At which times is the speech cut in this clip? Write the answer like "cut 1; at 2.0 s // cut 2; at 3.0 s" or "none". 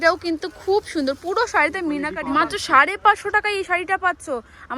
cut 1; at 2.1 s